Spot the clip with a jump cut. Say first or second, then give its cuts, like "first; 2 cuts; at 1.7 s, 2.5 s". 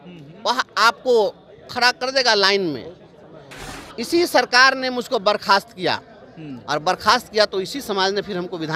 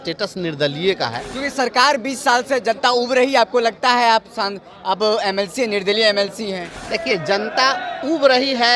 second; 2 cuts; at 1.3 s, 6.7 s